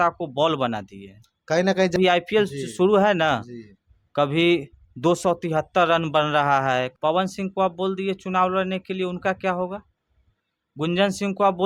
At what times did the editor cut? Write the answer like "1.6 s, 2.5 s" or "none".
1.9 s, 6.9 s